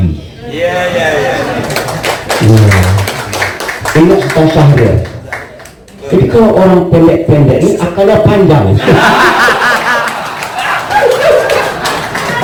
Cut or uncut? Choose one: uncut